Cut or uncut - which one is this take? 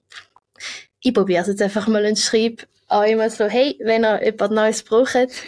uncut